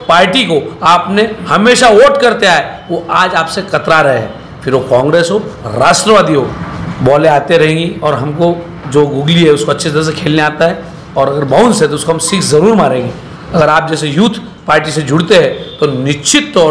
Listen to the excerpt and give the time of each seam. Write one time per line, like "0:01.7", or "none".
0:06.6
0:13.4